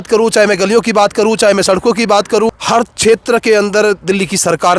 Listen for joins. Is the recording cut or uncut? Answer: cut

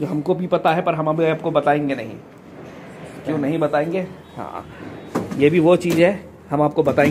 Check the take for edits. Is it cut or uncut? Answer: uncut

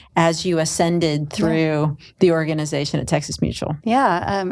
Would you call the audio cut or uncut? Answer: uncut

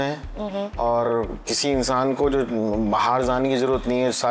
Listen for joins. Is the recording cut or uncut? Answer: uncut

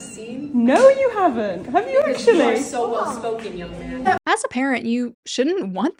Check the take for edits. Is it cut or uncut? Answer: uncut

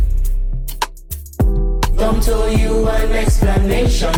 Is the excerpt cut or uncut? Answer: uncut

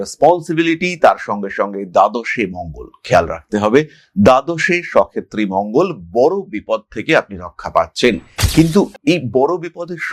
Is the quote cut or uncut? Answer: uncut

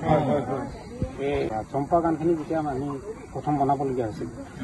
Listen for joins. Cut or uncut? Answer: cut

